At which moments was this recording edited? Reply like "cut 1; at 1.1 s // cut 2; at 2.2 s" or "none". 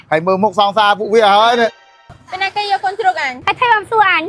cut 1; at 1.8 s // cut 2; at 3.3 s